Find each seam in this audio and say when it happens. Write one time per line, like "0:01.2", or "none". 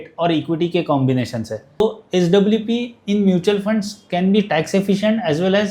0:01.8